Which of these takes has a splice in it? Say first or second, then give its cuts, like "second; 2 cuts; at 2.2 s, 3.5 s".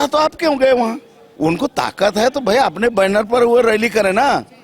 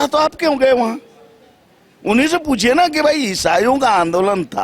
first; 1 cut; at 1.2 s